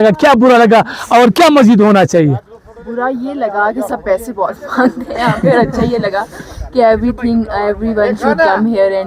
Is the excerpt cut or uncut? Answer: uncut